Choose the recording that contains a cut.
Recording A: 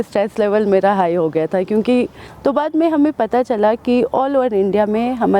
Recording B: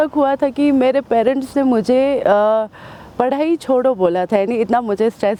A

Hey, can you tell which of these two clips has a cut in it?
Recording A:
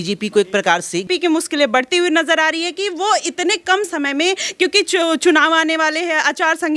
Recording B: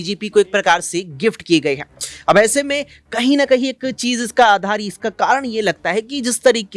A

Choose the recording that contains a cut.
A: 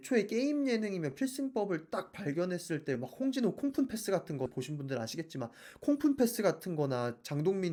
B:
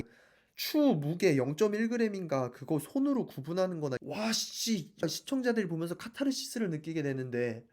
B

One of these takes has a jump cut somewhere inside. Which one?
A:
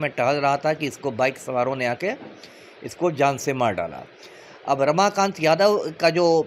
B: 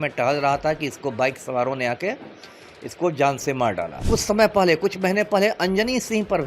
B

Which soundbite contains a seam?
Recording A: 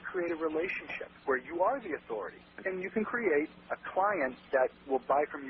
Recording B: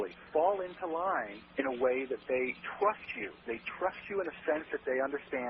A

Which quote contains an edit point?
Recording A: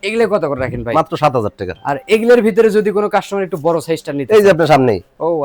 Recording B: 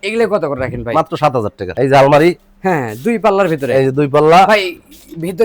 B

